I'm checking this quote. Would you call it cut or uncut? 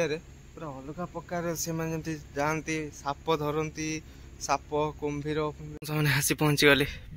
cut